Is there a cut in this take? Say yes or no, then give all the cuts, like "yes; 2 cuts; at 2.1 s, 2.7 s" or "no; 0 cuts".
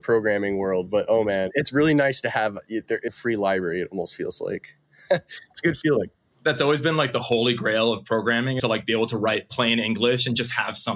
yes; 3 cuts; at 1.5 s, 3.1 s, 8.8 s